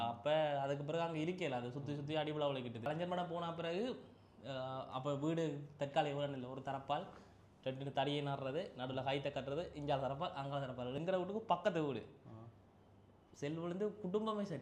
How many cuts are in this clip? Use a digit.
2